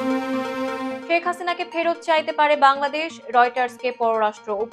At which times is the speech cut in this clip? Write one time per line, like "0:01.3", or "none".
0:01.0